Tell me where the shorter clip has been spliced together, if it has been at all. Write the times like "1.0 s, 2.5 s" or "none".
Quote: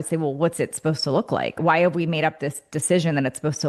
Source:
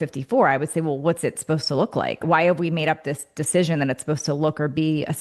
none